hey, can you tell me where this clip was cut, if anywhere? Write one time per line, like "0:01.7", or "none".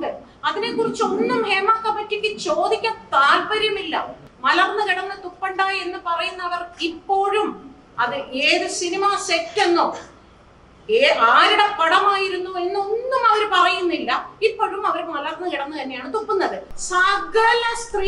0:04.2
0:16.7